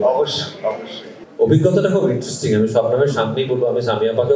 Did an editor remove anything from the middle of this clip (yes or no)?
no